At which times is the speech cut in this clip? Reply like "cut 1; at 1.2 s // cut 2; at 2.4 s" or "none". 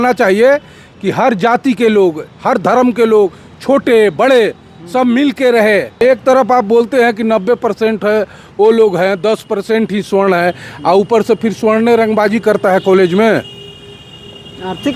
cut 1; at 6.0 s